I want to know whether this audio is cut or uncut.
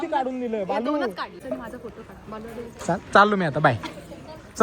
cut